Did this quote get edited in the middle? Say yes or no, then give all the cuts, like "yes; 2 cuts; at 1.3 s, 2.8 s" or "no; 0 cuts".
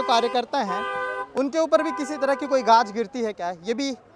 no; 0 cuts